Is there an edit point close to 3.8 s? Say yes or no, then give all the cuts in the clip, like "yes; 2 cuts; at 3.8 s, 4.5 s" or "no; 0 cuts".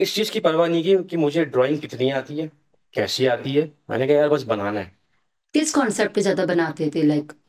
no; 0 cuts